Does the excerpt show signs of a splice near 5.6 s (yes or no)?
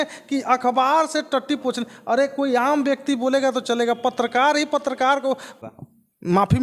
yes